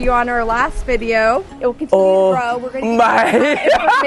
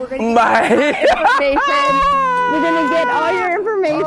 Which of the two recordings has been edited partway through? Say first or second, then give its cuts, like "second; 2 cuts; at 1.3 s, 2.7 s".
first; 1 cut; at 1.5 s